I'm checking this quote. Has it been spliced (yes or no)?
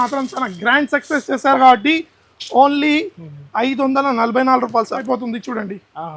yes